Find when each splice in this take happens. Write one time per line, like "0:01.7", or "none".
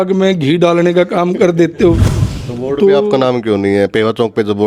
0:02.1